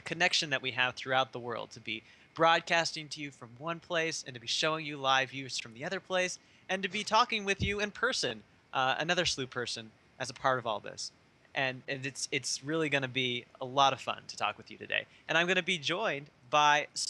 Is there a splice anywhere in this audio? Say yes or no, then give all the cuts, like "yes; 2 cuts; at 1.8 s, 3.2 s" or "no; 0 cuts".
yes; 1 cut; at 13.5 s